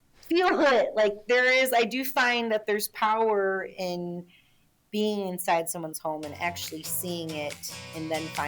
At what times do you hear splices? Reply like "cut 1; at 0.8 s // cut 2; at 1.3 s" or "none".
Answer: none